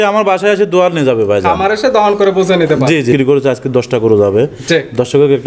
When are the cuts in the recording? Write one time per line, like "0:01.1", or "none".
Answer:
0:03.1